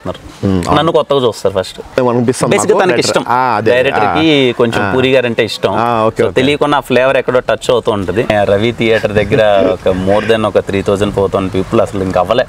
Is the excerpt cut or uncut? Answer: cut